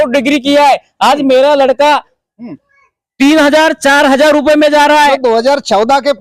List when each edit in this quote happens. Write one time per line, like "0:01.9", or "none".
0:05.1